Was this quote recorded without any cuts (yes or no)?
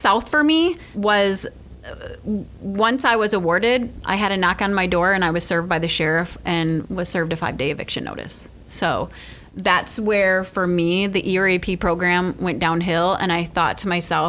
no